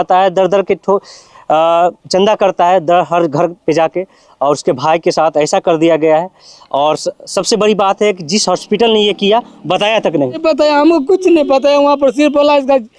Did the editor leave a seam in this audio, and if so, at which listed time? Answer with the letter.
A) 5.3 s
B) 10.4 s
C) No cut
B